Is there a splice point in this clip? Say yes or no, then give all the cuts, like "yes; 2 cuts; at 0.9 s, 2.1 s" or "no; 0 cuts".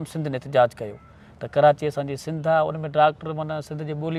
no; 0 cuts